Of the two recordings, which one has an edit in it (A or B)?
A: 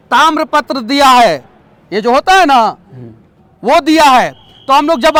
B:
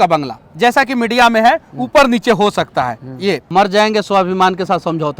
B